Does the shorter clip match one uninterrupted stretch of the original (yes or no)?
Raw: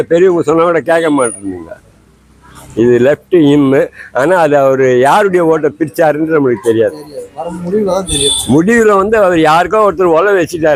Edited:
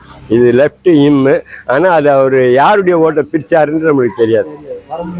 yes